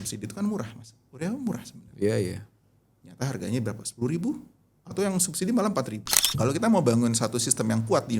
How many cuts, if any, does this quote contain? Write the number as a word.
one